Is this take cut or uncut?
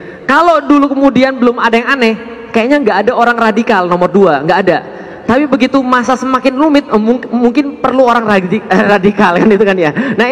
uncut